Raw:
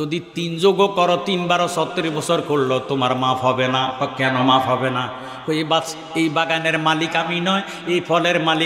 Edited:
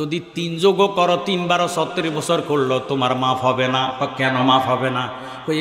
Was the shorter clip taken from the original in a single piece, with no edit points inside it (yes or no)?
yes